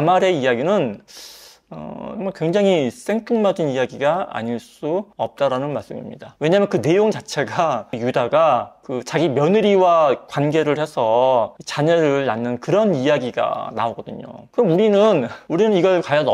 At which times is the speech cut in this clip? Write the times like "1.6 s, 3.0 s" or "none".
none